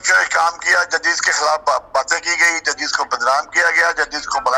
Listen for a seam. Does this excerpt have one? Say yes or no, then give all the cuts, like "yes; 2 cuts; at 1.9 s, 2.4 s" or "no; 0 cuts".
no; 0 cuts